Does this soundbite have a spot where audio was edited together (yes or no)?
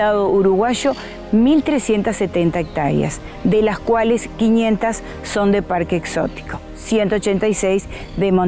no